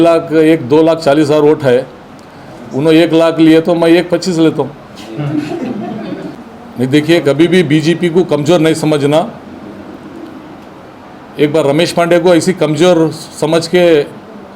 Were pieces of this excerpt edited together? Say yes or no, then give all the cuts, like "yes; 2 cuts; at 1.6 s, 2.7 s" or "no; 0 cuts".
yes; 1 cut; at 6.3 s